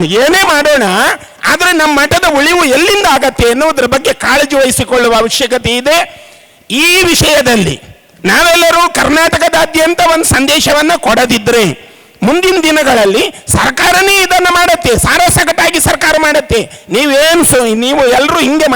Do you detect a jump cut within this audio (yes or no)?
no